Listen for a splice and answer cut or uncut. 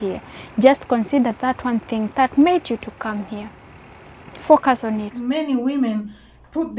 cut